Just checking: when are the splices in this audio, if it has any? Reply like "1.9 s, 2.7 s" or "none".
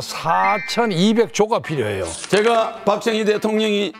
2.1 s